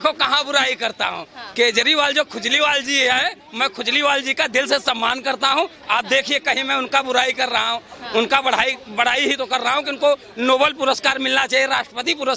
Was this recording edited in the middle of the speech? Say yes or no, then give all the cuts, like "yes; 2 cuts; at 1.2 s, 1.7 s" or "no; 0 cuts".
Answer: no; 0 cuts